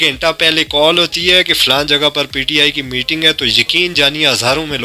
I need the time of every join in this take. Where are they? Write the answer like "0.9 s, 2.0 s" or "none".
none